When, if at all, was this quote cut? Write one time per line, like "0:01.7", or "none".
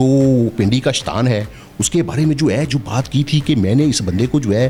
none

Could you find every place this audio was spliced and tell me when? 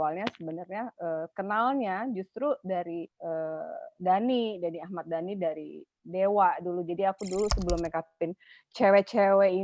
0:03.1

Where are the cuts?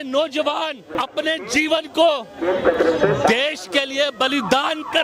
0:01.0

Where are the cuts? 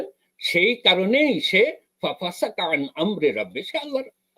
none

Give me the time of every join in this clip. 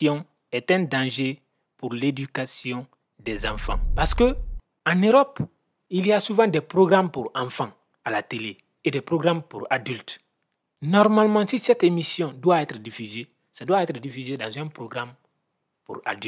0:03.9

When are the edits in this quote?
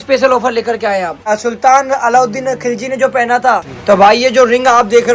0:01.3
0:03.7

